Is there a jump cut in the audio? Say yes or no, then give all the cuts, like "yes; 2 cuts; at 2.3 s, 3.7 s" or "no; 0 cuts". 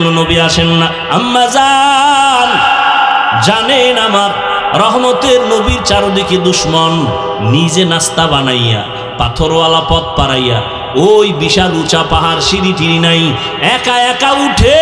no; 0 cuts